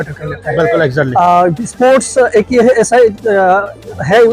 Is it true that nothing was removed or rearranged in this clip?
yes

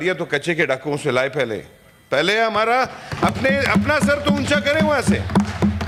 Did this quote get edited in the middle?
no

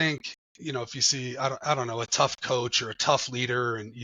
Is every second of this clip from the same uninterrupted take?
yes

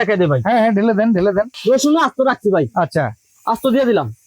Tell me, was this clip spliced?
yes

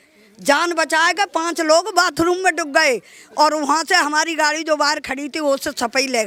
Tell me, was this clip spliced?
no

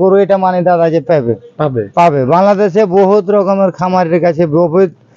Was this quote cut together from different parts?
no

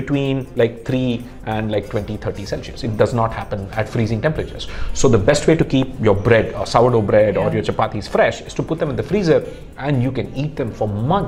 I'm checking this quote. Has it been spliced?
no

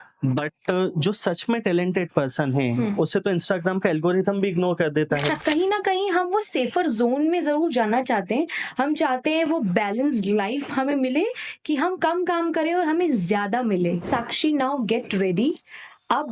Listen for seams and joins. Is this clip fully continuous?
no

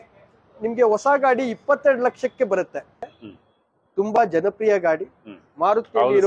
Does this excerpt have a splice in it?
yes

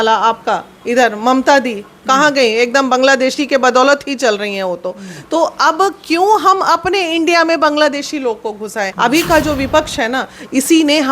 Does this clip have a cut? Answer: yes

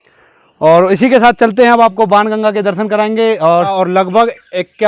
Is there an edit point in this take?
yes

